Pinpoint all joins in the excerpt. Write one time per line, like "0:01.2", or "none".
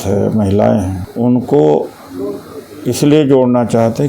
0:01.0